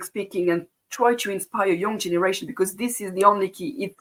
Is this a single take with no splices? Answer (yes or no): yes